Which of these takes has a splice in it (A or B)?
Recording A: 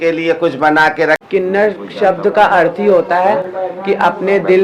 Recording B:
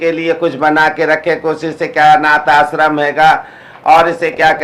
A